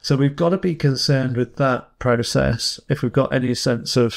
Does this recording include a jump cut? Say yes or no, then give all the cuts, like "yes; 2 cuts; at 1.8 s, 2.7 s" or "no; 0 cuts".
no; 0 cuts